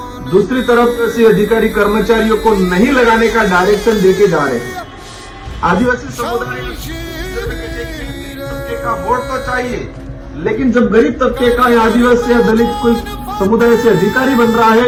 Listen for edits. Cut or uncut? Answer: uncut